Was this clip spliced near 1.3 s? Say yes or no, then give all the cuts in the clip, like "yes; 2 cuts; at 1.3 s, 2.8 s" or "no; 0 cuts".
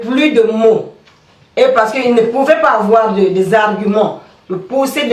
no; 0 cuts